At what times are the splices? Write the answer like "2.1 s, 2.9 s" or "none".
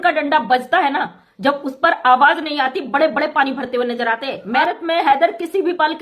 4.6 s